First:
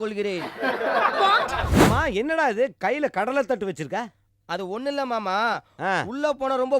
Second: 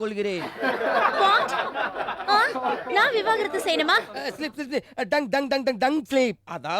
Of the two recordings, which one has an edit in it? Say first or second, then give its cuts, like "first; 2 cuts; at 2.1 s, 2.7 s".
first; 1 cut; at 1.7 s